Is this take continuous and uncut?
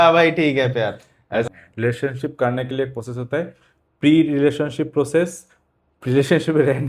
no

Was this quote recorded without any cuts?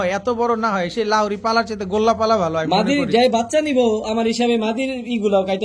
yes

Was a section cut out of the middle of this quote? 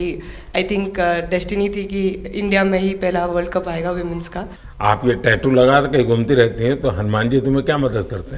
yes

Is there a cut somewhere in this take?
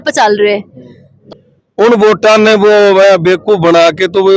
yes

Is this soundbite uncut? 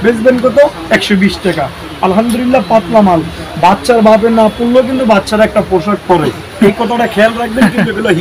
yes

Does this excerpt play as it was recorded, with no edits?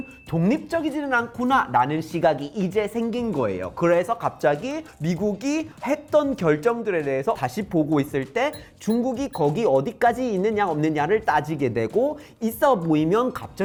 yes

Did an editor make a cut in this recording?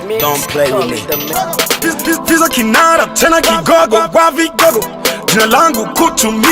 no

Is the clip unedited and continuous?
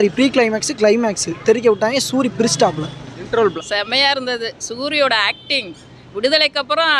no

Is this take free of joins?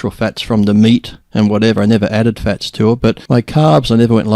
no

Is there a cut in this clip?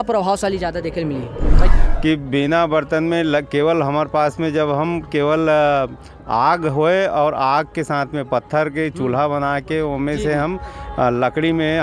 yes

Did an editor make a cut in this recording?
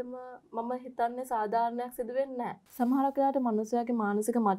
yes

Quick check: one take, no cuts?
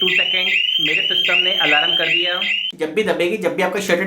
no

